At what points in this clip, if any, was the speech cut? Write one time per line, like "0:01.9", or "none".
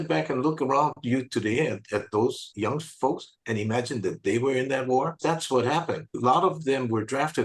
0:06.1